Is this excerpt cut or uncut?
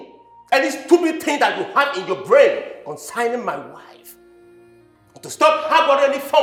uncut